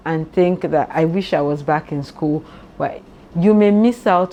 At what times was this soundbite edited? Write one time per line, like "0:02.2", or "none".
none